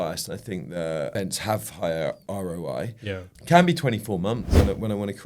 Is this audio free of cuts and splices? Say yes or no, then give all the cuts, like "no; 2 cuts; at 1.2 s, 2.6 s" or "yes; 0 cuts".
no; 3 cuts; at 1.1 s, 2.2 s, 4.6 s